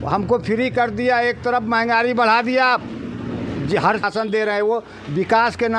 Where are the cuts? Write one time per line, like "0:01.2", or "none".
0:04.1